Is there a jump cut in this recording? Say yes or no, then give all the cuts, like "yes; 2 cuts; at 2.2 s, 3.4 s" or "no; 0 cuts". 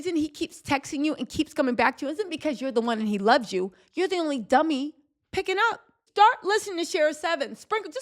yes; 1 cut; at 6.0 s